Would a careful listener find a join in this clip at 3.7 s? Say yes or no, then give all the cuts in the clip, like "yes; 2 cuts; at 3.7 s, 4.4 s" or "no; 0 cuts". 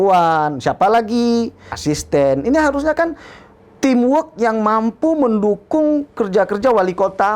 no; 1 cut; at 1.7 s